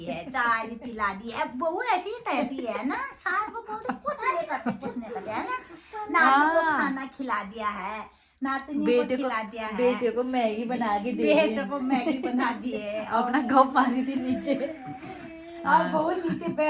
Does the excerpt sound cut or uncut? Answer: uncut